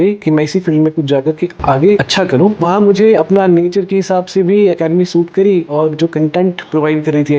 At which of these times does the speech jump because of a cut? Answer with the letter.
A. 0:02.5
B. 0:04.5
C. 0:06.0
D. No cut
A